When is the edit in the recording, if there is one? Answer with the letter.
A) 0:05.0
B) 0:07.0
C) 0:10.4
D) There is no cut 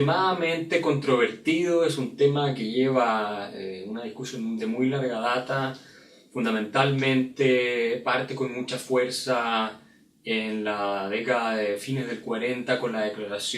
B